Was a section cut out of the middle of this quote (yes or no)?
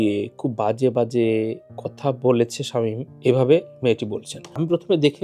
no